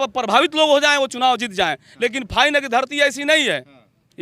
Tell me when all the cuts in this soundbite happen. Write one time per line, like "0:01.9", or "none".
none